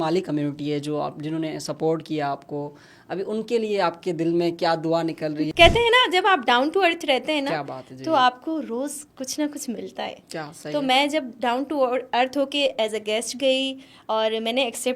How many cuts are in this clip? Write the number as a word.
one